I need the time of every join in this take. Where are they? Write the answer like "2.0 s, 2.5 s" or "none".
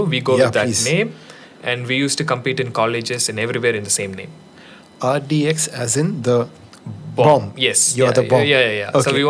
none